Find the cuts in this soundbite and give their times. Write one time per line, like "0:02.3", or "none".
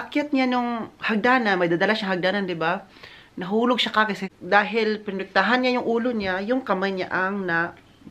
0:04.3